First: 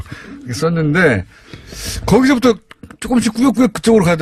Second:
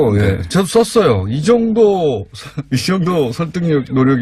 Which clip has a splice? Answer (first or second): second